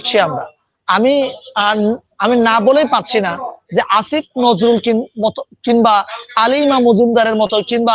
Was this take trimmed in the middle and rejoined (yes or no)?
no